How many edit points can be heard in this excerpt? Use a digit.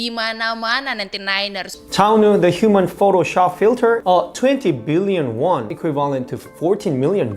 1